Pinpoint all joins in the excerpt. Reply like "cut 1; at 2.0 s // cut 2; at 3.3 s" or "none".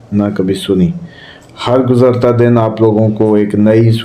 none